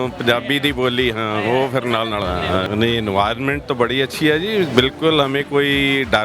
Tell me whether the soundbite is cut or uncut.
cut